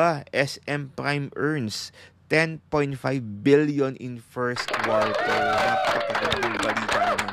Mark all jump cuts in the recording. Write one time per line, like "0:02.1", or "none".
0:04.7